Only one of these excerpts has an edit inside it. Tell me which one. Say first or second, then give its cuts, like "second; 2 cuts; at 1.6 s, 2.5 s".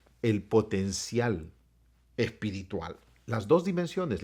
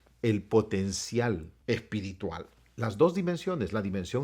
second; 1 cut; at 1.5 s